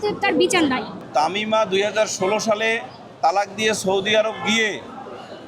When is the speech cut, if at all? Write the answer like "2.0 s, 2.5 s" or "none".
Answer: 1.0 s